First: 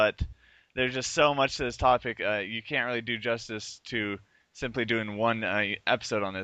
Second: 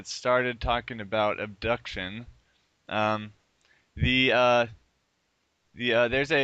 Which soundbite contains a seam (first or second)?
second